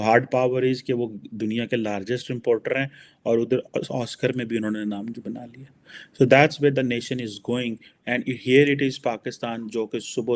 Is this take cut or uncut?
uncut